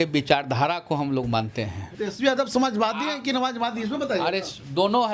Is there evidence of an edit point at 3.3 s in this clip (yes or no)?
no